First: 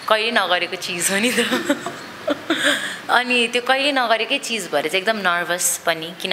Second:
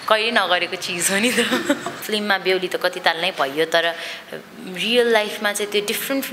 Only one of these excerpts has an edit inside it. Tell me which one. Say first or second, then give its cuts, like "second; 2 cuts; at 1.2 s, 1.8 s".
second; 1 cut; at 1.9 s